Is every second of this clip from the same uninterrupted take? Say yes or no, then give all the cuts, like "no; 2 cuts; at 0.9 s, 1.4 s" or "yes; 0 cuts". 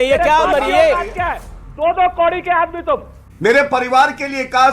no; 2 cuts; at 1.4 s, 3.2 s